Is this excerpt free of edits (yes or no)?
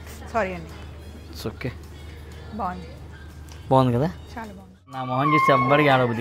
no